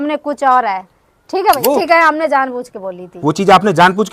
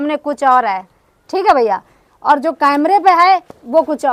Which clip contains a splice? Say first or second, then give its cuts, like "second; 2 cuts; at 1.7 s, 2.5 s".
first; 1 cut; at 1.6 s